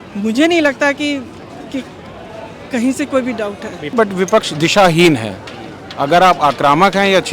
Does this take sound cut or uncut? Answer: cut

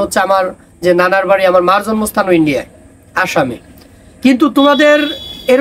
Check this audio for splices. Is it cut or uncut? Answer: uncut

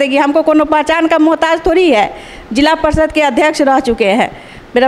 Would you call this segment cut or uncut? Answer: uncut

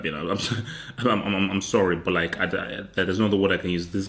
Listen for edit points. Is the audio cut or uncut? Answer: uncut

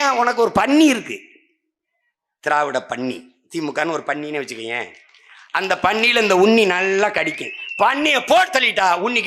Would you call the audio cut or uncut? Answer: uncut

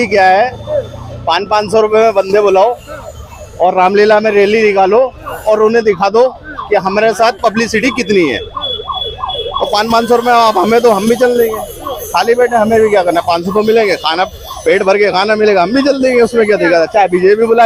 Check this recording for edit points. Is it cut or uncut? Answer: uncut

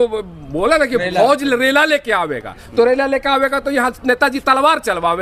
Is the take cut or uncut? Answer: uncut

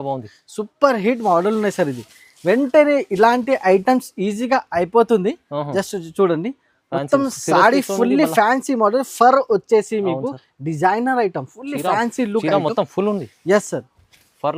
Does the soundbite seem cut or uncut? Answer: uncut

